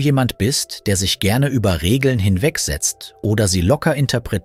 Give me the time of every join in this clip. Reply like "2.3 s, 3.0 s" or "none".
none